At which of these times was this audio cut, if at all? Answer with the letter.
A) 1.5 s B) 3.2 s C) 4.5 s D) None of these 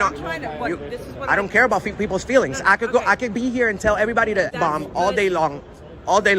C